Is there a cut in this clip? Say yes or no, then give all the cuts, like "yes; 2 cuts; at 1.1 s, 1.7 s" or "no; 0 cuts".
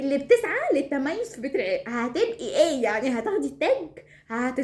no; 0 cuts